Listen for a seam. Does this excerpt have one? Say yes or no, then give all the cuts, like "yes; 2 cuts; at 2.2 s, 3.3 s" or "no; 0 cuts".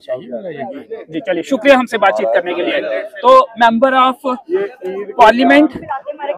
no; 0 cuts